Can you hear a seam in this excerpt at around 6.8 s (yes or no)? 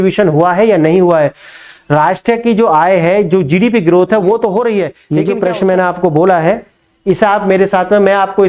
no